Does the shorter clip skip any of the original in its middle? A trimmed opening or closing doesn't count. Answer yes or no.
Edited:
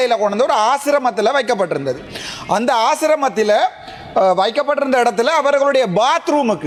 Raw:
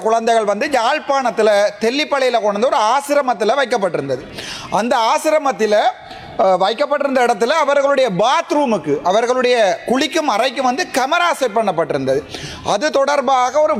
no